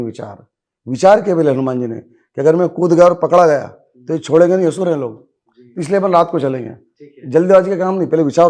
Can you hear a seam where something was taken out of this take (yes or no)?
no